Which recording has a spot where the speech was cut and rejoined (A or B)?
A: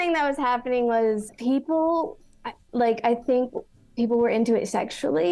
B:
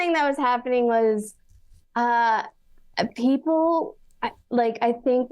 A